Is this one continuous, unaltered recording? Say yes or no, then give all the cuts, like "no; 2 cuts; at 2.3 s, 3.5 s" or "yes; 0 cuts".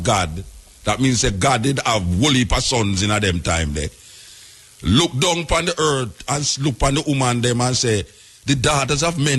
yes; 0 cuts